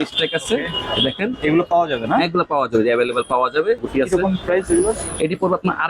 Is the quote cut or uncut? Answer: cut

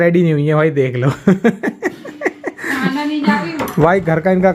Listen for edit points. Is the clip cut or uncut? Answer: uncut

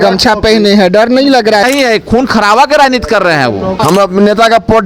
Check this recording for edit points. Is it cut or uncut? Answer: cut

